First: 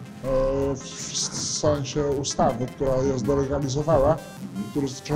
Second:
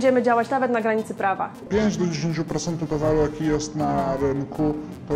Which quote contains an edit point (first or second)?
second